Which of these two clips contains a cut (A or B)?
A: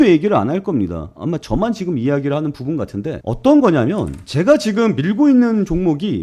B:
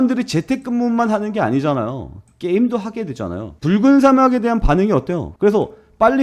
B